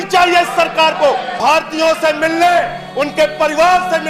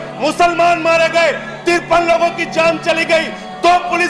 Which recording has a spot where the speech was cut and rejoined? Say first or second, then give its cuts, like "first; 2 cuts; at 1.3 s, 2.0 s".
first; 1 cut; at 1.3 s